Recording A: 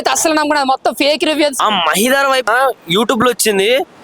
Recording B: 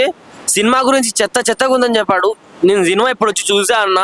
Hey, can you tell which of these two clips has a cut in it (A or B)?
A